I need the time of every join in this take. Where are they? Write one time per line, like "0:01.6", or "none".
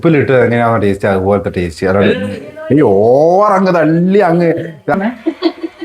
0:04.9